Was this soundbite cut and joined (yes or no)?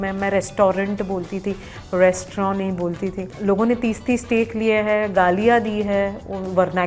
no